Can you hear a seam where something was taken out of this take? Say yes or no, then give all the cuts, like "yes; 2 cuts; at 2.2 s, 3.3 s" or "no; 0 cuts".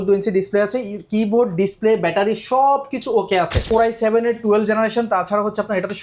yes; 1 cut; at 3.7 s